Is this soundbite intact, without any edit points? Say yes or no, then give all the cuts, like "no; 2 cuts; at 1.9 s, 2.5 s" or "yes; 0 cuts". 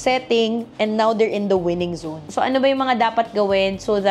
no; 1 cut; at 2.1 s